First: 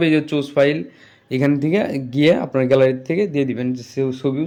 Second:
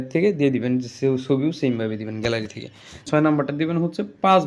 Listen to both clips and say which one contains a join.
second; 1 cut; at 3.1 s

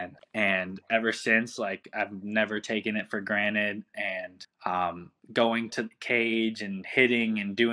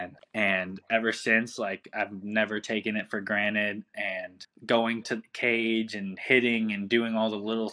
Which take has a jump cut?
second; 1 cut; at 4.4 s

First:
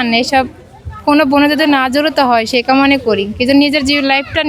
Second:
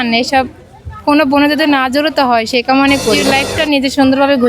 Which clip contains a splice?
second; 1 cut; at 3.2 s

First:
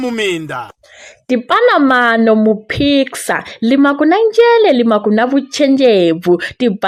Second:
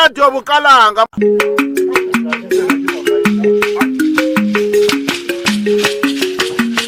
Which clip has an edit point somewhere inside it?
second; 1 cut; at 1.1 s

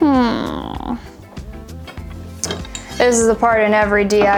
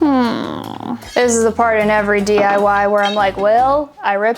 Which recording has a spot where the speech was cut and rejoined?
second; 1 cut; at 1.0 s

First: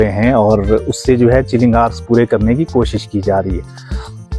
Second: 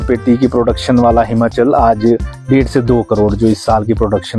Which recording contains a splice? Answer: second; 1 cut; at 2.3 s

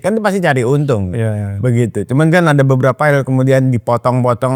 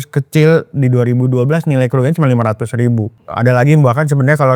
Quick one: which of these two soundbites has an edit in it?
second; 1 cut; at 3.2 s

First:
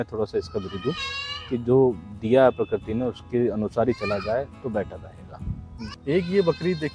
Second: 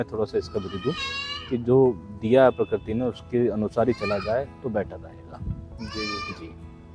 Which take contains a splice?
first; 1 cut; at 5.9 s

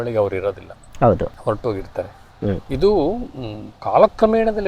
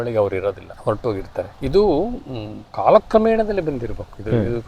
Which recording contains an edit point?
second; 1 cut; at 1.0 s

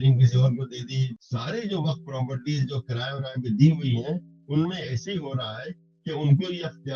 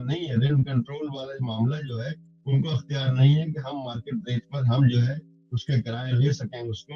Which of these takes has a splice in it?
first; 1 cut; at 1.0 s

